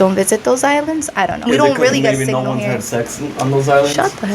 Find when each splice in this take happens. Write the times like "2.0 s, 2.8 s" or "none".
1.5 s